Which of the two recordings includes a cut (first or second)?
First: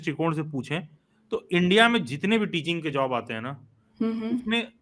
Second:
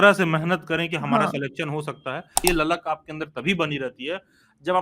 second